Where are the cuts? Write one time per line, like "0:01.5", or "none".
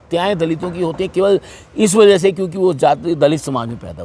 none